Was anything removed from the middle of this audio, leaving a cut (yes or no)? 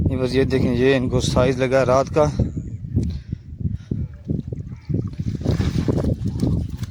no